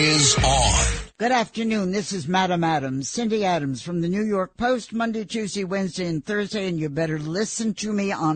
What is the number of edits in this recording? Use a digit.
1